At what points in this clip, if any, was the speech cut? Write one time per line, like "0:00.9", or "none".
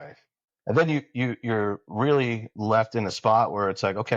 none

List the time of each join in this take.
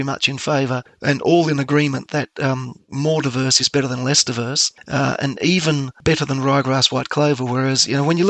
none

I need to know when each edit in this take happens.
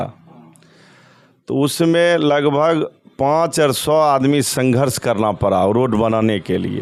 none

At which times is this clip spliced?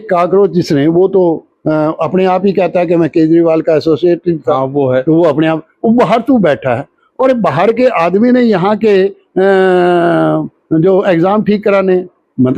none

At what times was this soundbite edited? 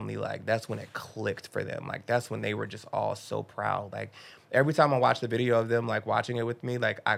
none

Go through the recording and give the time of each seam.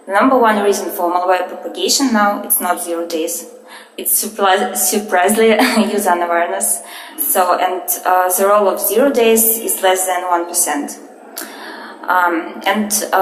0:12.0

